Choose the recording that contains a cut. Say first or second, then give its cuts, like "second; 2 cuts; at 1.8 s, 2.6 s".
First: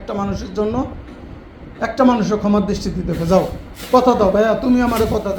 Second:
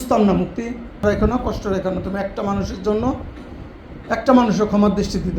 second; 1 cut; at 1.0 s